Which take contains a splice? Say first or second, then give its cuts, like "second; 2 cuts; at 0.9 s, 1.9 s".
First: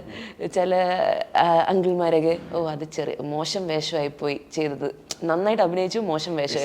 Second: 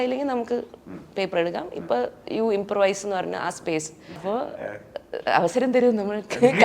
second; 1 cut; at 4.2 s